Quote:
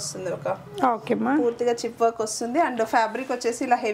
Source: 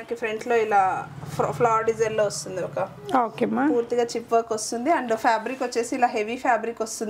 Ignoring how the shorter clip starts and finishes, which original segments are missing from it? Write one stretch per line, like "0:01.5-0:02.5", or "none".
none